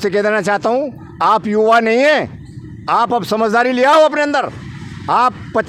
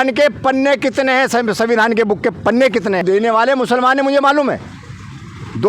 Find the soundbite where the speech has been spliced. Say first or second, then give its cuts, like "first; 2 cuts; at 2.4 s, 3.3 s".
second; 1 cut; at 3.0 s